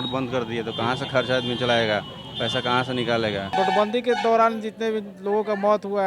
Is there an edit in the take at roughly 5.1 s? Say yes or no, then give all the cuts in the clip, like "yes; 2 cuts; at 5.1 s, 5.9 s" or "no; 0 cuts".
no; 1 cut; at 3.5 s